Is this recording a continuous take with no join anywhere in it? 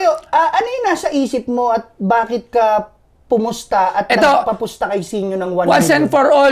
yes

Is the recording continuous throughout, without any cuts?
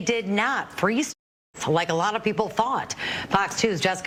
yes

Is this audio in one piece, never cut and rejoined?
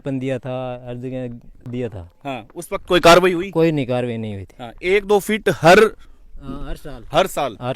no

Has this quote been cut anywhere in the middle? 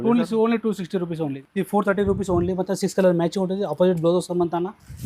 yes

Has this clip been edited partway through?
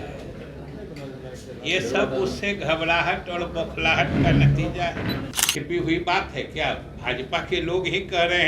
yes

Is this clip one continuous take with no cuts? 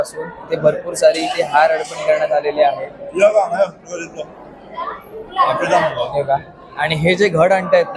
yes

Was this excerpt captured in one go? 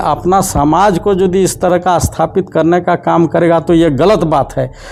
yes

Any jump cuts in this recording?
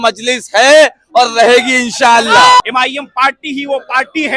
yes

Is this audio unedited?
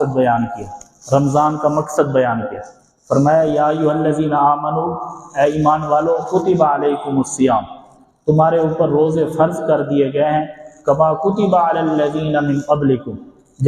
yes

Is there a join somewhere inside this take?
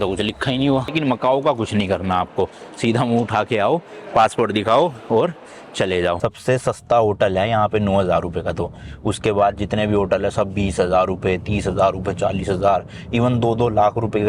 yes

